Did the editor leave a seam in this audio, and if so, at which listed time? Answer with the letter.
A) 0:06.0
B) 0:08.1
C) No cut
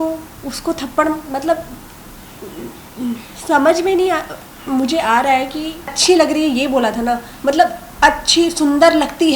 A